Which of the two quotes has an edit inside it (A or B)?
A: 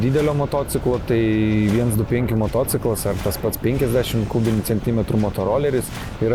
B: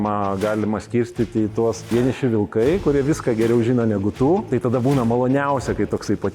B